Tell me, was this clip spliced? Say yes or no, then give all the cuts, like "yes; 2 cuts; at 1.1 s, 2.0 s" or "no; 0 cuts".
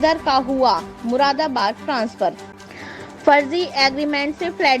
yes; 1 cut; at 2.5 s